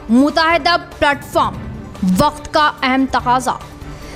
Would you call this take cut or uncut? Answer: uncut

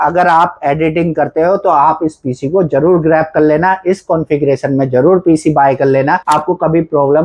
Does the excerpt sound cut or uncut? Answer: cut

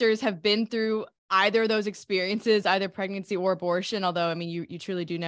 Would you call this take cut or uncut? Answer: cut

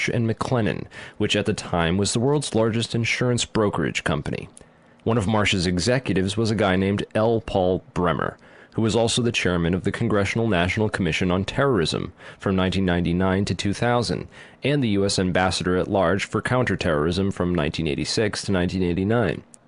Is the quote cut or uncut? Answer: uncut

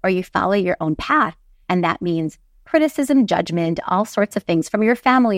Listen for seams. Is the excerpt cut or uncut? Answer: uncut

